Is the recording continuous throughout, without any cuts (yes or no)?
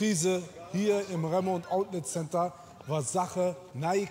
yes